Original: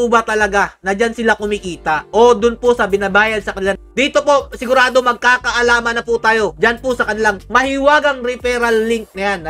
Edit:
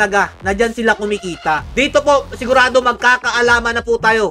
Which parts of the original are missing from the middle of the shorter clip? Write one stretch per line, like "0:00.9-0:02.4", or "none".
0:02.0-0:03.8

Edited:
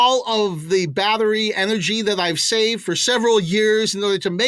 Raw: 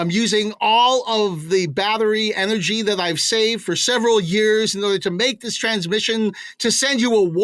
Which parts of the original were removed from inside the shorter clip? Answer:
none

